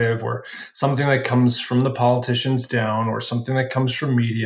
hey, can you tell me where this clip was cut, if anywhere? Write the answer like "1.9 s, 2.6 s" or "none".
none